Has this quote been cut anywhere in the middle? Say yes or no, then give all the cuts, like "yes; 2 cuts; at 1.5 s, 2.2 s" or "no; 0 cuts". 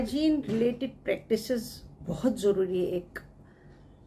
no; 0 cuts